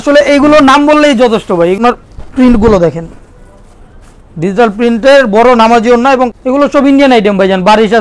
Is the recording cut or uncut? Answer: cut